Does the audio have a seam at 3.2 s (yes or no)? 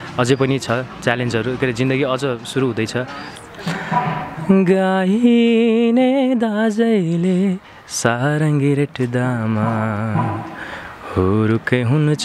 yes